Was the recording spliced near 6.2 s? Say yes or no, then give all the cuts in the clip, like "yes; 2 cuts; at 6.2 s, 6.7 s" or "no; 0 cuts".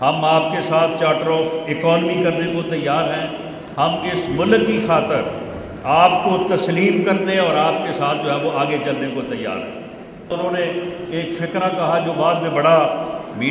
no; 1 cut; at 10.3 s